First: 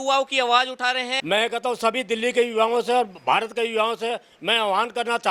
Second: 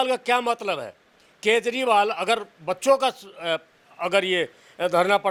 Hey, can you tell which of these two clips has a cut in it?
first; 1 cut; at 1.2 s

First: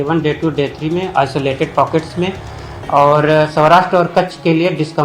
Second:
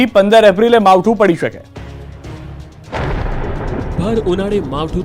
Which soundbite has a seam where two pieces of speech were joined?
first; 1 cut; at 3.5 s

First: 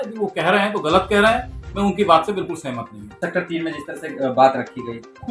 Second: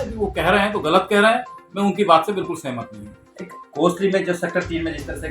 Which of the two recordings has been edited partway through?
first; 1 cut; at 3.2 s

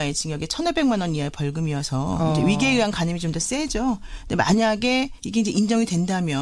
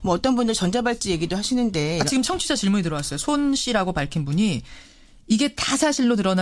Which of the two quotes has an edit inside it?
second; 1 cut; at 2.6 s

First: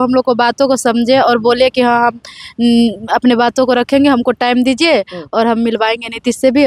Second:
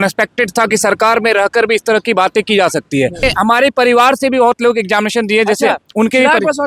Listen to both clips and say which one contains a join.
second; 1 cut; at 3.3 s

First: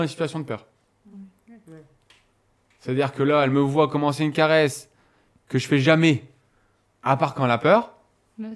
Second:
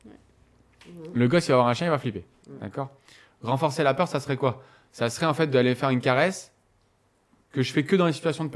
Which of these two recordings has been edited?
second; 1 cut; at 2.4 s

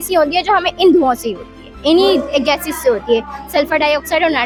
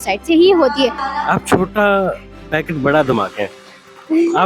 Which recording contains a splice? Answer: second; 1 cut; at 1.0 s

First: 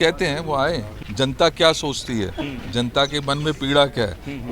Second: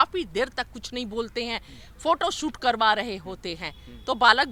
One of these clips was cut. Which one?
first; 1 cut; at 1.0 s

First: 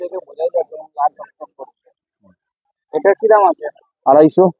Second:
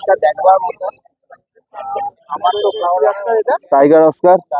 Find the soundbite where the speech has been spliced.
second; 1 cut; at 3.0 s

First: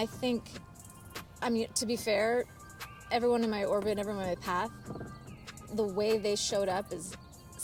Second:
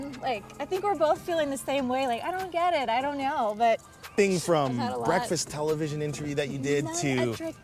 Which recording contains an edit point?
second; 1 cut; at 4.1 s

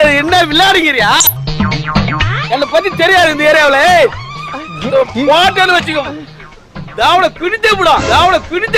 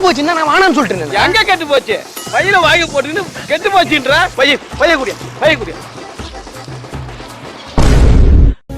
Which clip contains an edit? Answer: second; 1 cut; at 4.3 s

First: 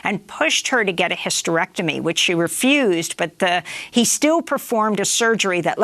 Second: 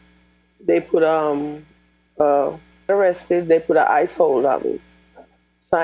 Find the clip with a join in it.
second; 1 cut; at 2.9 s

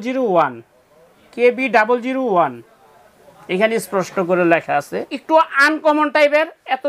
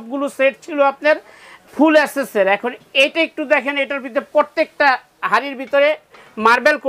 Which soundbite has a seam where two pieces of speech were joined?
first; 1 cut; at 5.1 s

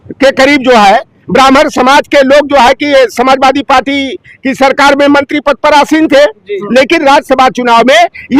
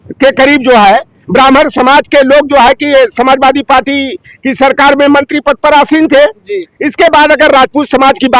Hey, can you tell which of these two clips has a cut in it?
first; 1 cut; at 6.5 s

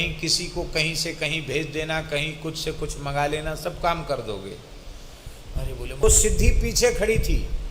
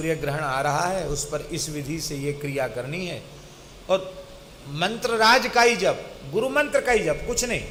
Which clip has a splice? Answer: first; 1 cut; at 6.0 s

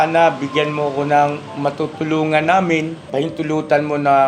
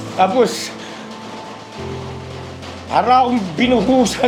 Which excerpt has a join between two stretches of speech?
first; 1 cut; at 3.0 s

